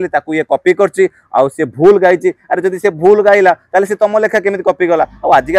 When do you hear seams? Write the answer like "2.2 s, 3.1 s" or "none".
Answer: none